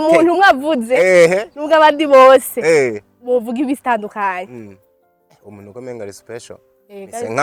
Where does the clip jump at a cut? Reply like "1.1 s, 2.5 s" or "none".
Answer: none